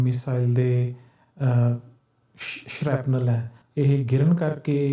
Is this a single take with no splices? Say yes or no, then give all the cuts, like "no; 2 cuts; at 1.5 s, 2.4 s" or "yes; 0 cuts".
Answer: no; 1 cut; at 3.6 s